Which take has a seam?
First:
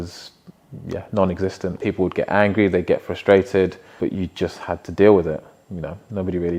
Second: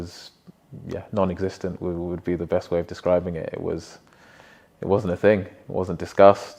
first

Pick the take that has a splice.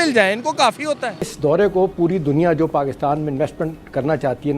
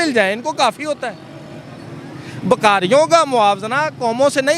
first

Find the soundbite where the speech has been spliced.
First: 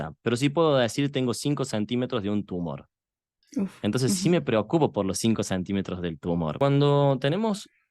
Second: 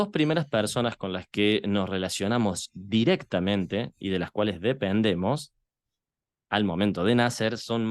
first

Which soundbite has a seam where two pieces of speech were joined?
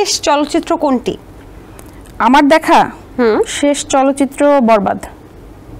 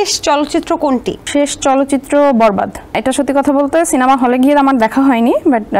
second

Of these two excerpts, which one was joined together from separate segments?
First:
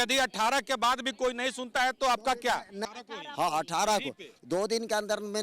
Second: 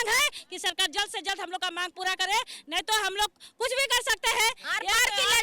first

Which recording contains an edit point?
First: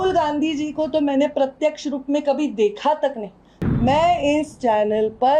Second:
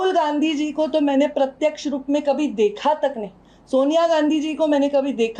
first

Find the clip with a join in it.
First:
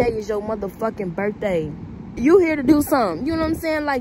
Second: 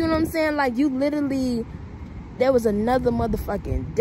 first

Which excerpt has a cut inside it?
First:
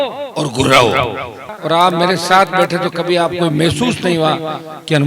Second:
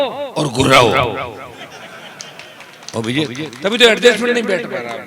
first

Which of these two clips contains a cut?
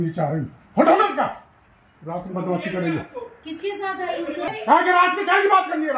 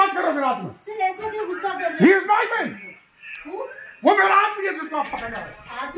first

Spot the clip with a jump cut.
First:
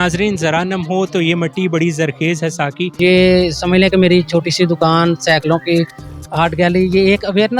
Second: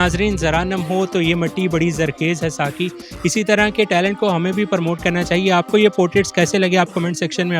first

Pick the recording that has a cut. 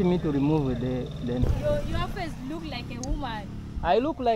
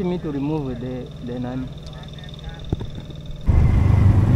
first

